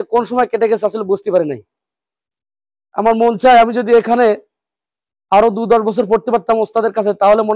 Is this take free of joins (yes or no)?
yes